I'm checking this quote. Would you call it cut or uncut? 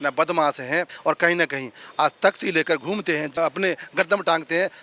cut